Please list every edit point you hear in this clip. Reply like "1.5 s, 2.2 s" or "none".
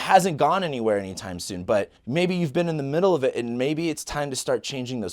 2.0 s

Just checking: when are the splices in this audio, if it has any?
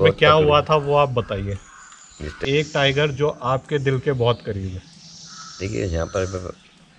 2.4 s

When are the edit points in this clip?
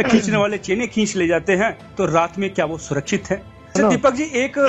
3.8 s

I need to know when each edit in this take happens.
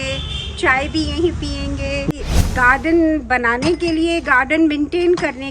2.2 s

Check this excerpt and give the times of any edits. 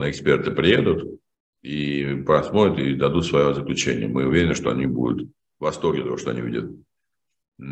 none

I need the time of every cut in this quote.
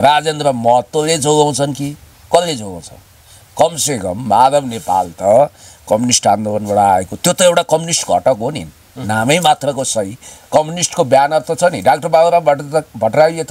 none

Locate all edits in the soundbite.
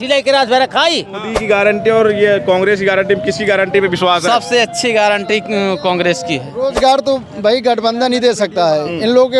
1.3 s, 6.6 s

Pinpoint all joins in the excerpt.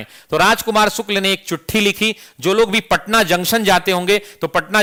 none

